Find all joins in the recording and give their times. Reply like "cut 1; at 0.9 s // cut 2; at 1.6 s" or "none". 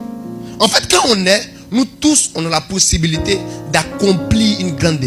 none